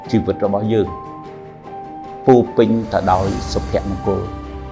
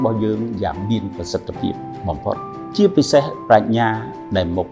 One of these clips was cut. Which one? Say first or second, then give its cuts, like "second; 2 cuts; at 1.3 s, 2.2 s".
second; 1 cut; at 2.7 s